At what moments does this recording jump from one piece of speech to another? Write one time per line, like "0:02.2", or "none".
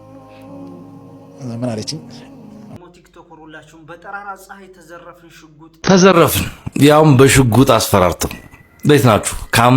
0:02.7
0:05.7